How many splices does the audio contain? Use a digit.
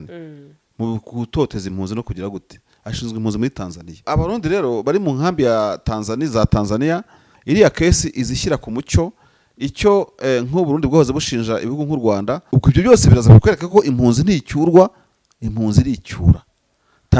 2